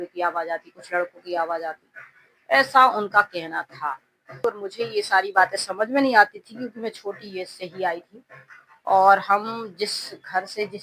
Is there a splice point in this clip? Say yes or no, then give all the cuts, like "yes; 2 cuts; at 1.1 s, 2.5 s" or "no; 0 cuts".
yes; 1 cut; at 4.4 s